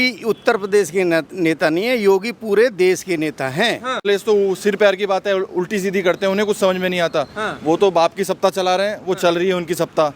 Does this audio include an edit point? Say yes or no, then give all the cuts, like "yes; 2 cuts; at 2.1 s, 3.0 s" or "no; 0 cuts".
yes; 1 cut; at 4.0 s